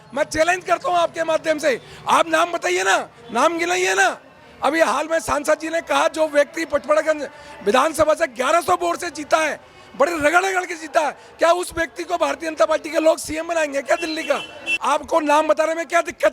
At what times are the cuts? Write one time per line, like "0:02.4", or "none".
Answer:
0:14.7